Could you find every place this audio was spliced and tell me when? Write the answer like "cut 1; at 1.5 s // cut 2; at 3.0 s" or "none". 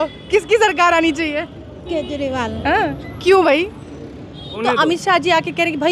cut 1; at 4.5 s